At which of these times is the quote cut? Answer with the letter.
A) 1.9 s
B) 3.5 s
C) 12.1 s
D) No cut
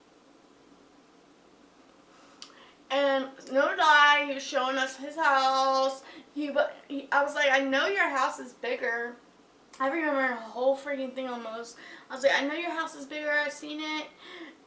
A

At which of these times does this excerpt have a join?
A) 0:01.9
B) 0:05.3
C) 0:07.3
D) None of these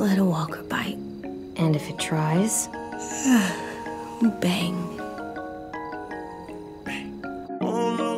D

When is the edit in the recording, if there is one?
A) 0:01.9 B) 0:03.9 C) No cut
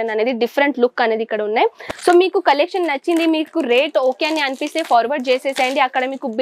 A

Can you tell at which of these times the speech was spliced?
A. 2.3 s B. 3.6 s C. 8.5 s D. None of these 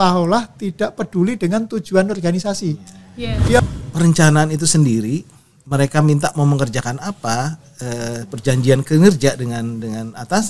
B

